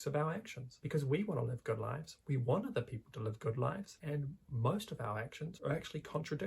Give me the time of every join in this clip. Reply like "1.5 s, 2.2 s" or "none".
5.5 s